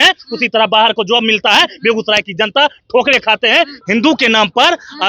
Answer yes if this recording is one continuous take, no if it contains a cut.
no